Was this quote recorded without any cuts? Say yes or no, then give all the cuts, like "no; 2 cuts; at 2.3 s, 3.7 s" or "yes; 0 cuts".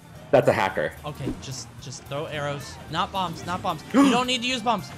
no; 1 cut; at 1.1 s